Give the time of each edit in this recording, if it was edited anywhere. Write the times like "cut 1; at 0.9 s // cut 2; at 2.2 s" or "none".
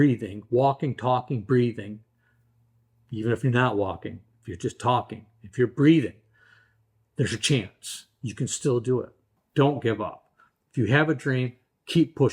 cut 1; at 9.3 s

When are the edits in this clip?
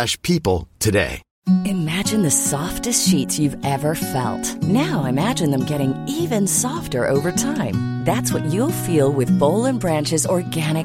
cut 1; at 1.2 s

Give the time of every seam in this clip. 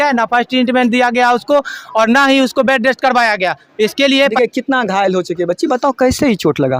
cut 1; at 4.3 s

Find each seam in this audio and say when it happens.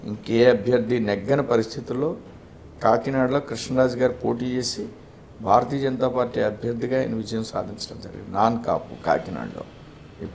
none

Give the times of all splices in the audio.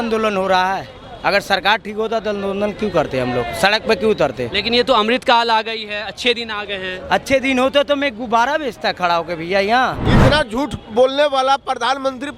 cut 1; at 10.1 s

